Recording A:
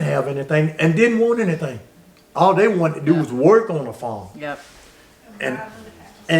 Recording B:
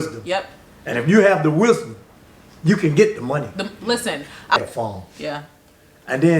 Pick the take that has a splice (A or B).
B